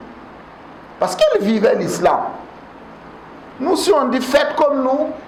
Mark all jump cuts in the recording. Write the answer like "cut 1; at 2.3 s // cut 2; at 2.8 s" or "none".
none